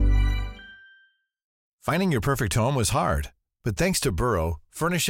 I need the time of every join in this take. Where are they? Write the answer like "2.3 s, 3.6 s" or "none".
1.6 s